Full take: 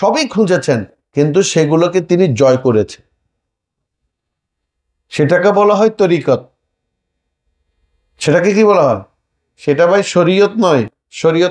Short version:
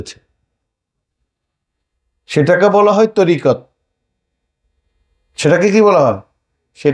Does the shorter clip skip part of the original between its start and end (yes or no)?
no